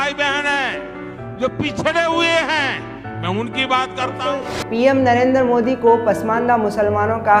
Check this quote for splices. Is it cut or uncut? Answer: cut